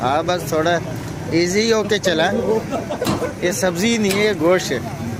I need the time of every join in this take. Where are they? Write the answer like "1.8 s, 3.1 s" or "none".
none